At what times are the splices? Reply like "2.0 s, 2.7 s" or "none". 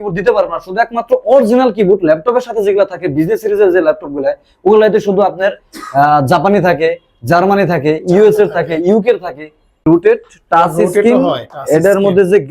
9.8 s